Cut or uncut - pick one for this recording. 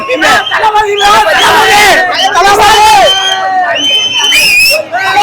uncut